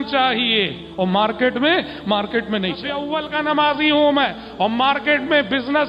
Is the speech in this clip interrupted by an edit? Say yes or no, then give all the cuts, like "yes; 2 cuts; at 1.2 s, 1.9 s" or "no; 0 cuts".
yes; 1 cut; at 3.0 s